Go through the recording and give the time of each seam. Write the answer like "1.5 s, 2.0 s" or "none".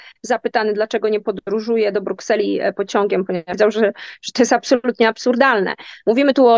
3.6 s